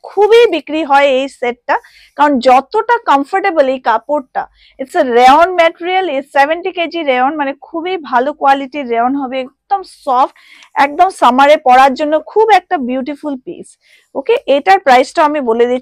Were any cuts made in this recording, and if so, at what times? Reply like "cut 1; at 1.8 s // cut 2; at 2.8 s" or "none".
none